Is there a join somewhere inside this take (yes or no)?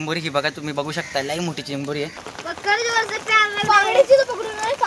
yes